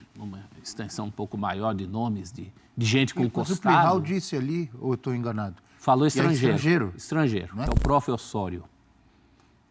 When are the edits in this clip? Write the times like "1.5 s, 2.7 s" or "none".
7.7 s